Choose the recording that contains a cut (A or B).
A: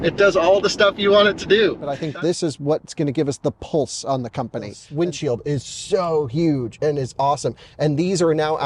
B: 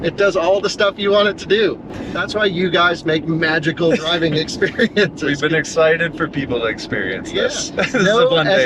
A